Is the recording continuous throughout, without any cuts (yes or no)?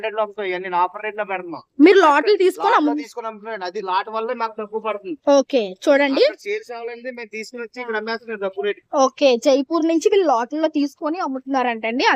yes